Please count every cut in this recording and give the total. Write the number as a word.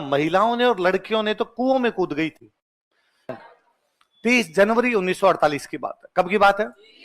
one